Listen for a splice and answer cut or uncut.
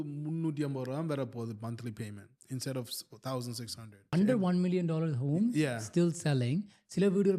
cut